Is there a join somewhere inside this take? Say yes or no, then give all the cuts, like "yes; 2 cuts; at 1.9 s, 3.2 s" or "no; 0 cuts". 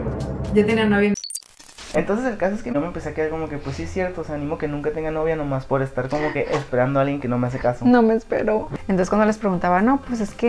yes; 2 cuts; at 1.4 s, 8.7 s